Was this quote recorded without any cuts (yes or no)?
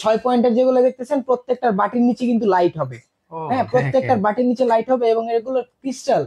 yes